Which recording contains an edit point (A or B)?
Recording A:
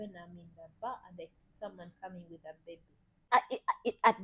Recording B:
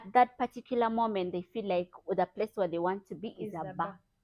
A